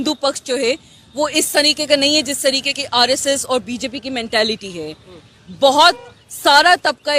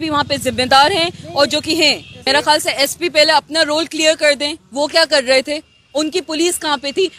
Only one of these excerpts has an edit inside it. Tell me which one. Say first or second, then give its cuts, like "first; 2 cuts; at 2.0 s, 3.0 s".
second; 1 cut; at 2.2 s